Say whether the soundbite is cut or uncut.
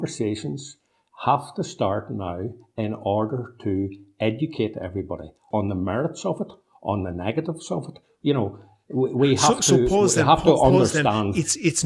cut